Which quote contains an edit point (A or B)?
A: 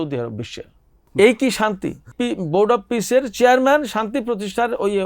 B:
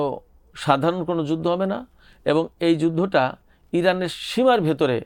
A